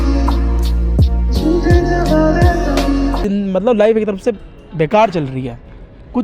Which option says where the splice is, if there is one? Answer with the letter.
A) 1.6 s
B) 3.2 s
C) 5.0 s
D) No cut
B